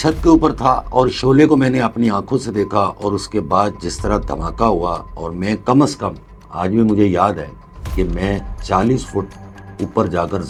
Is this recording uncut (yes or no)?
yes